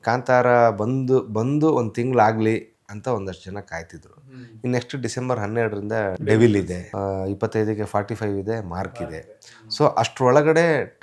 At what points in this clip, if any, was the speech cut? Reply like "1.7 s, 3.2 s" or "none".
6.2 s, 6.8 s